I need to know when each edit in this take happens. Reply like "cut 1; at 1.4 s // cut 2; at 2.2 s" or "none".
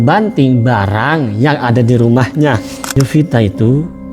cut 1; at 2.9 s